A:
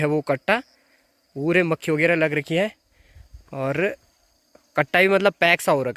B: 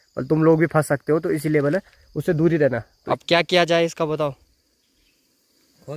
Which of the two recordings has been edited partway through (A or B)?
B